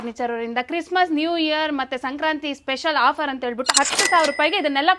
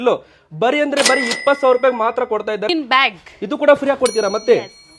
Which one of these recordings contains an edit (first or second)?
second